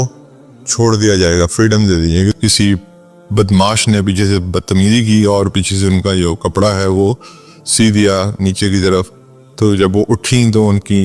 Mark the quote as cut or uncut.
cut